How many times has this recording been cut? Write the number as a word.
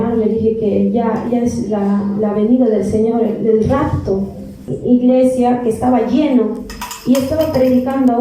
one